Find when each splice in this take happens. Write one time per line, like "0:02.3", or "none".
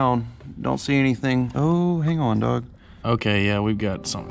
0:03.0